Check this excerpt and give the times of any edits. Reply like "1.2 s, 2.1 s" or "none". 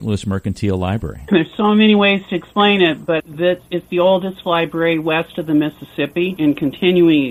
none